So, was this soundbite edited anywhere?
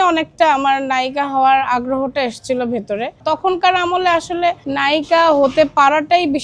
yes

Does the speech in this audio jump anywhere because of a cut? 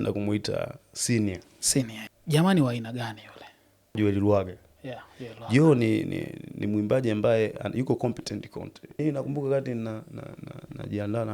yes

